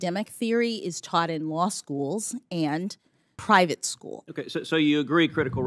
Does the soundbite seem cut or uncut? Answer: cut